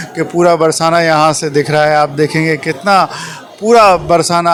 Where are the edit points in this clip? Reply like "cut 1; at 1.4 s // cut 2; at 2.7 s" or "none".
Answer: none